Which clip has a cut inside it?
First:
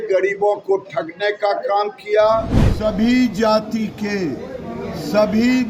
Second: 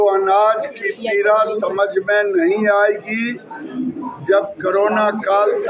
first; 1 cut; at 2.6 s

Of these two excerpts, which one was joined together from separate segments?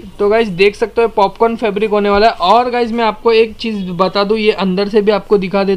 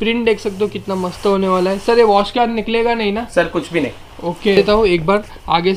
second; 1 cut; at 4.6 s

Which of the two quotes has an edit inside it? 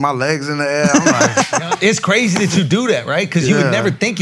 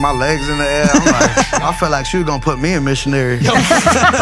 second; 2 cuts; at 1.6 s, 3.4 s

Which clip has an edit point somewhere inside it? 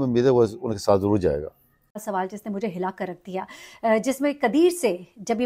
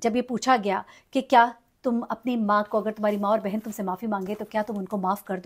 first; 1 cut; at 1.9 s

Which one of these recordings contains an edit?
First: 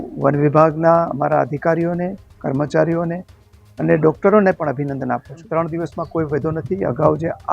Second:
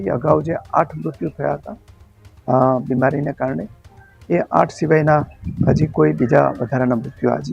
first; 1 cut; at 5.5 s

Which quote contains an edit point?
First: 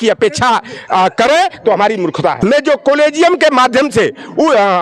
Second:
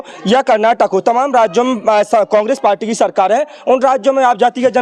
first; 1 cut; at 2.4 s

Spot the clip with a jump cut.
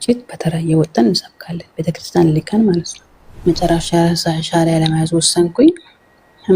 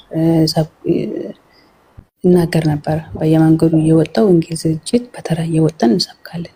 first; 1 cut; at 3.4 s

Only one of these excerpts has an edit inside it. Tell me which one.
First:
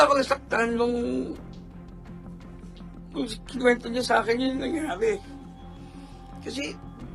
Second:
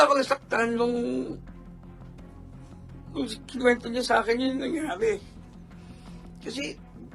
second; 2 cuts; at 1.4 s, 3.1 s

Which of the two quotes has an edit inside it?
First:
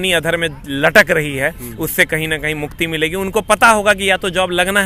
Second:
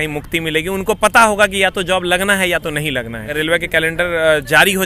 second; 1 cut; at 3.3 s

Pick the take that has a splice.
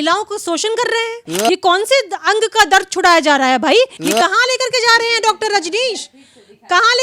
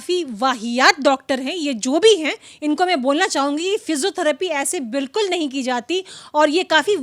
first; 2 cuts; at 1.3 s, 4.0 s

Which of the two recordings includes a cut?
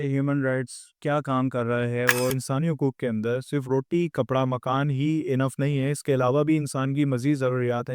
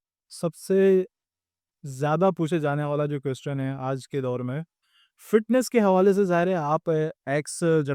first; 1 cut; at 2.3 s

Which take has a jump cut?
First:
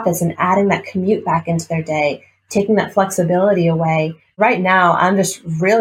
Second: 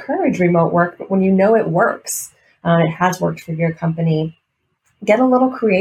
first; 1 cut; at 4.2 s

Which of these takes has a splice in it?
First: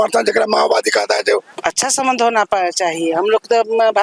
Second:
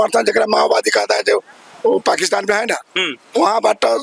first; 1 cut; at 1.5 s

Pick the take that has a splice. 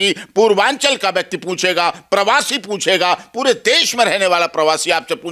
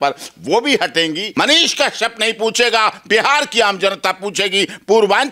second; 1 cut; at 1.2 s

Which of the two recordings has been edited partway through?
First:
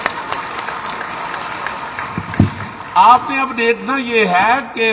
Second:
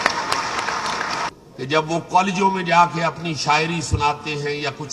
second; 1 cut; at 1.3 s

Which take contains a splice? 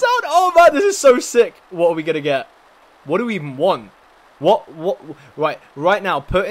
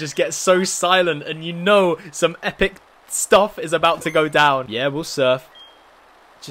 second; 1 cut; at 4.7 s

